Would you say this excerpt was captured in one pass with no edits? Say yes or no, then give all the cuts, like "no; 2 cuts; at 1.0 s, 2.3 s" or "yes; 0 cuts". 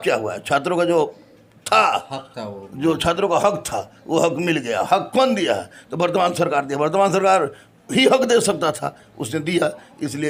yes; 0 cuts